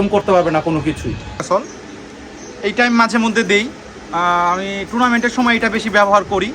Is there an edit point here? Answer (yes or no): yes